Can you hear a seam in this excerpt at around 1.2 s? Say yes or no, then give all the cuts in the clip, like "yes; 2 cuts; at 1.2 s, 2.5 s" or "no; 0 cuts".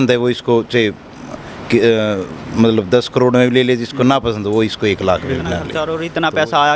no; 1 cut; at 5.7 s